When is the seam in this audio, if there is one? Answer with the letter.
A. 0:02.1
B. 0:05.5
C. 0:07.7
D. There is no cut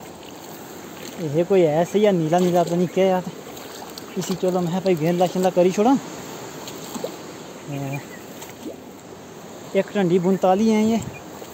D